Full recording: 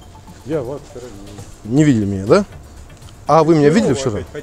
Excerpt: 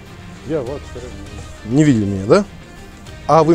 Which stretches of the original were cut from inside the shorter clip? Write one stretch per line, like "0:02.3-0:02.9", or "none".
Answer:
none